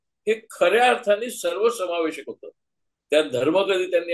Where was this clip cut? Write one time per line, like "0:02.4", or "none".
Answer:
none